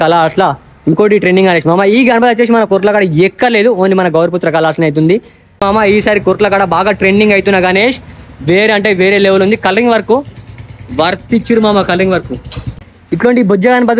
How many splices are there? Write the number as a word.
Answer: two